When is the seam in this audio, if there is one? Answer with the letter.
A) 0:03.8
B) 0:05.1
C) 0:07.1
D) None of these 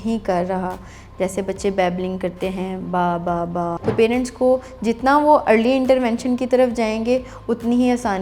A